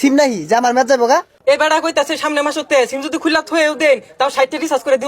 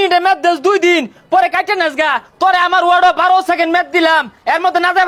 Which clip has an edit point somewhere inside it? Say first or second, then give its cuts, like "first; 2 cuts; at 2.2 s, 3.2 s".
first; 1 cut; at 1.3 s